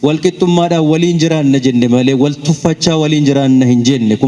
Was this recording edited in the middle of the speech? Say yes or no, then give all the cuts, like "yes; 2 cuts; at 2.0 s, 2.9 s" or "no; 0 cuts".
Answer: no; 0 cuts